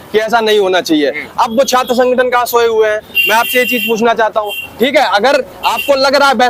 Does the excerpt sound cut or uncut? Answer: uncut